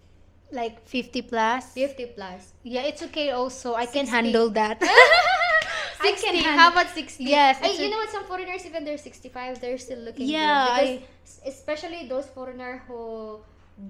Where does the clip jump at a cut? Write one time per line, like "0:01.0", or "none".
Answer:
none